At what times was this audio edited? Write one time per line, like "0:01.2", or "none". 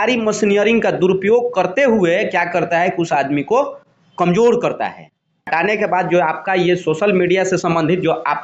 0:05.5